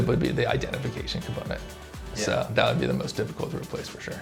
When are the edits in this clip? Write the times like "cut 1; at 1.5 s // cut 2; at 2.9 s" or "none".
none